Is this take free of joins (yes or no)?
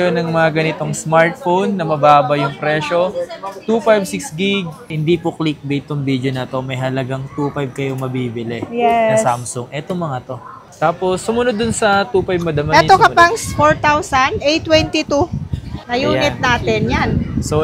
no